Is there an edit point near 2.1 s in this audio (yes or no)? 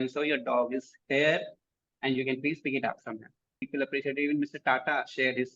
no